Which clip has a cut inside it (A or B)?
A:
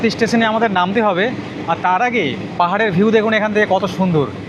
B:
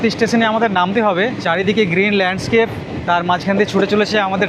B